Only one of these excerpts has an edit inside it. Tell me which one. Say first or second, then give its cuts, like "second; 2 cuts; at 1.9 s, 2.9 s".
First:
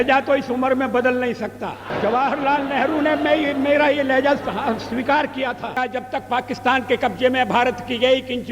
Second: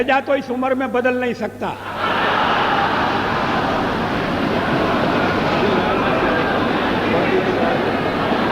first; 2 cuts; at 1.9 s, 5.8 s